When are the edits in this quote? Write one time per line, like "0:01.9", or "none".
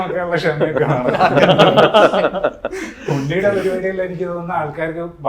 none